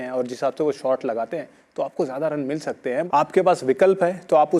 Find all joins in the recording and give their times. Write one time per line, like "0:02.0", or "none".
0:02.9

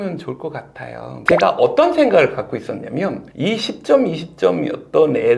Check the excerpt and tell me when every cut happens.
0:01.1

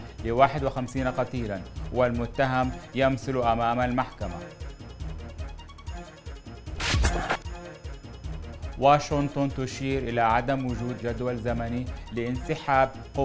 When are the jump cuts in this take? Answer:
0:04.4
0:06.8
0:07.4
0:08.7

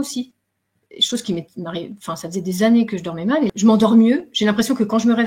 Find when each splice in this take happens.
0:03.5

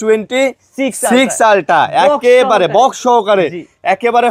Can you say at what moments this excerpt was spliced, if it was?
none

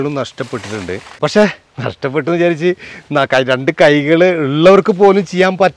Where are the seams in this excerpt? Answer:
0:01.1

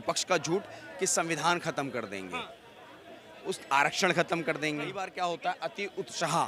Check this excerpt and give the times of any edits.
0:05.0

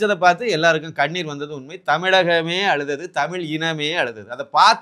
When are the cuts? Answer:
none

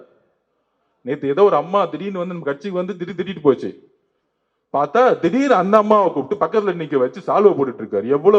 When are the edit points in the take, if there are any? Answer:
none

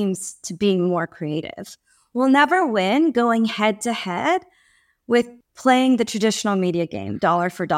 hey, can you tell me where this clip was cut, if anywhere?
0:05.4

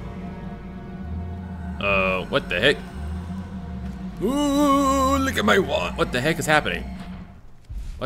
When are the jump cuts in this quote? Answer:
none

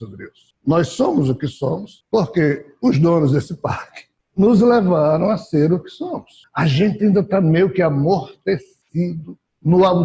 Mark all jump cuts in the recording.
0:06.3

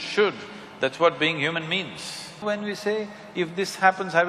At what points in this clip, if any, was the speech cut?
0:02.4

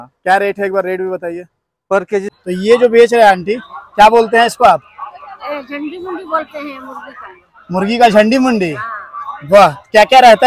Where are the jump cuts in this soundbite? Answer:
0:02.3

